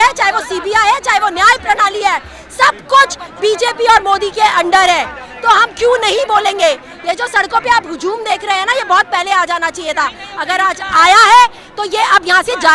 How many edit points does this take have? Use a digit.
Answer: 0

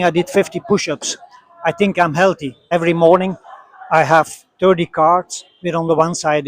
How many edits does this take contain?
1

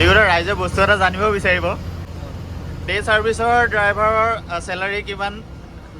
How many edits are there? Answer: 1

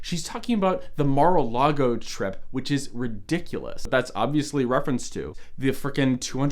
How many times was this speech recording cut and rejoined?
2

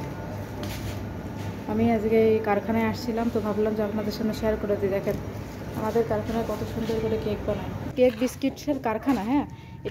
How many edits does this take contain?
1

